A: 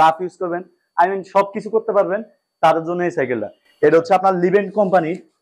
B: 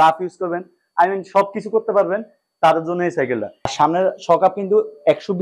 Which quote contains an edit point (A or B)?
B